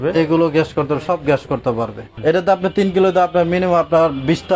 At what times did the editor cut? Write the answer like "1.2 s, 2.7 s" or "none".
2.0 s